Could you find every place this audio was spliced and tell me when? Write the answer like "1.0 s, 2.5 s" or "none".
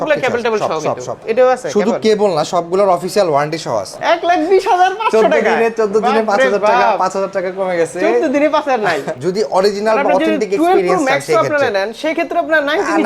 1.2 s, 3.9 s, 9.1 s